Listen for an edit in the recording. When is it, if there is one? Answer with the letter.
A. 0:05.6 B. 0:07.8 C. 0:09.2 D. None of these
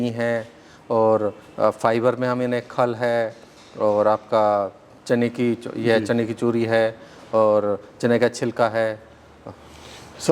D